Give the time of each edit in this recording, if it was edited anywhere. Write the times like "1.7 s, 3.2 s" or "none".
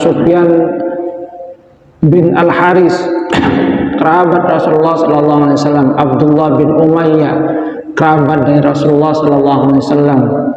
none

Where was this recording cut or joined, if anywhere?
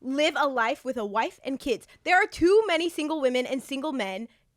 none

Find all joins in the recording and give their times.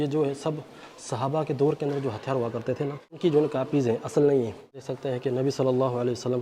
3.0 s, 4.9 s

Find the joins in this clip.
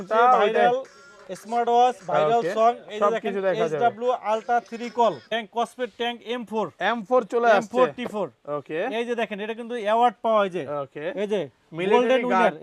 5.2 s

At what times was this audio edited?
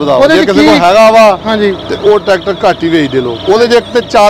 3.3 s

